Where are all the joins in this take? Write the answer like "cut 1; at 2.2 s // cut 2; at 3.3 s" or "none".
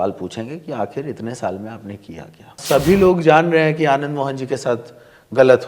cut 1; at 2.6 s

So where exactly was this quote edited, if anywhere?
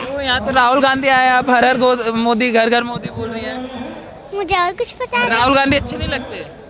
none

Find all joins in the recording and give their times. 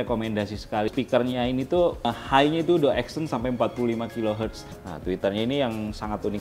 cut 1; at 0.9 s // cut 2; at 2.2 s // cut 3; at 4.8 s

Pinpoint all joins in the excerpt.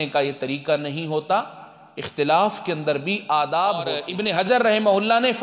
cut 1; at 4.0 s

